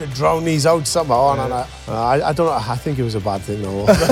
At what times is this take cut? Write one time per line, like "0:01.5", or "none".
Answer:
0:01.8